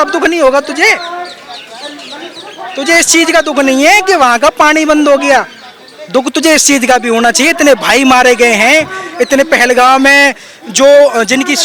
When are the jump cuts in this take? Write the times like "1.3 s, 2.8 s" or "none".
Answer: none